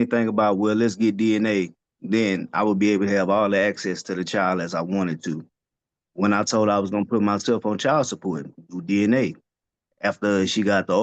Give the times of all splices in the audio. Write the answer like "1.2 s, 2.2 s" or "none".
none

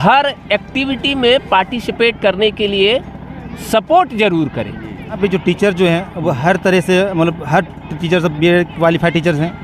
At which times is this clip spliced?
5.2 s

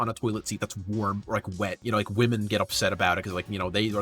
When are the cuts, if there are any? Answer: 1.8 s

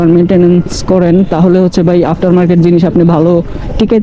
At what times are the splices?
none

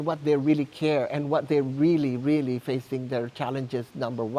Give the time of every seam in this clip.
none

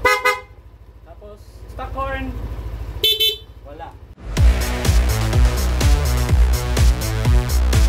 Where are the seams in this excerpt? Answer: 4.2 s

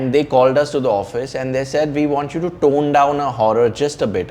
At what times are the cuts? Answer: none

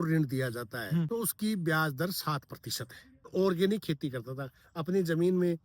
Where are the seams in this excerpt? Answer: 1.1 s, 3.3 s

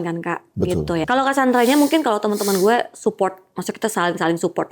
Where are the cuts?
1.0 s

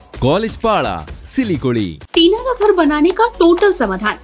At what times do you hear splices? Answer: 2.0 s

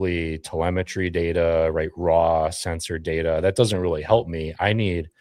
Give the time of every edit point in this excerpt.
none

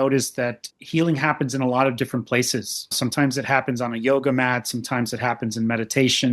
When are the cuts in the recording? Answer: 2.9 s

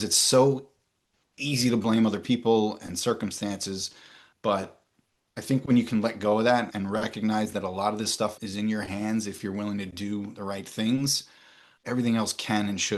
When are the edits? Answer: none

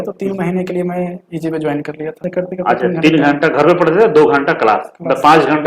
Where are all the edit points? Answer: 2.2 s

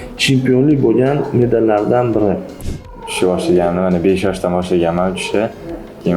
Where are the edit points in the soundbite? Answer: 2.9 s

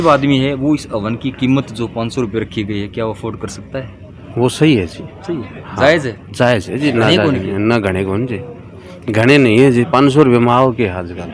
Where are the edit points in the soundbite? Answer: none

